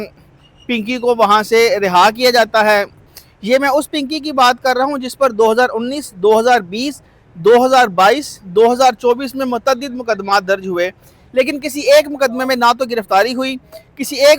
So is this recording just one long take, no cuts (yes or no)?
no